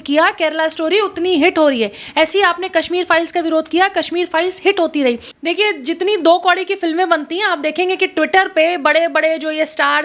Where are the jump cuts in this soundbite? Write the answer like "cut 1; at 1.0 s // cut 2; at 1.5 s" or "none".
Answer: cut 1; at 5.3 s